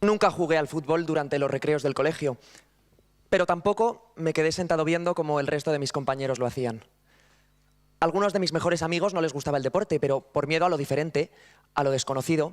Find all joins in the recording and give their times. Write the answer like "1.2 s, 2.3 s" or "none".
2.5 s